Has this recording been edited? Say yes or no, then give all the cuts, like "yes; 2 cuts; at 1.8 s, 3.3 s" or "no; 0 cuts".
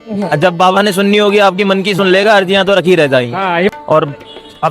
yes; 1 cut; at 3.7 s